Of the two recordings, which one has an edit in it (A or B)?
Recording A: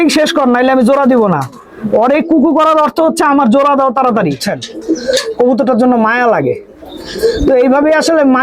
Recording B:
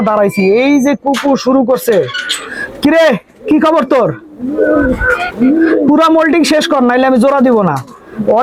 A